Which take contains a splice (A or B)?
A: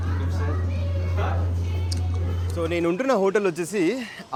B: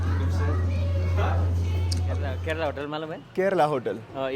B